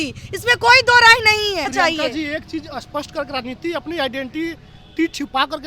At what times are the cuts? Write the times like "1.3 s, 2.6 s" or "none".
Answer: 1.7 s